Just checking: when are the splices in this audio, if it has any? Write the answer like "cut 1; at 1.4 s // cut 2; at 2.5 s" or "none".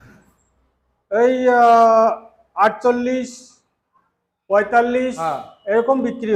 none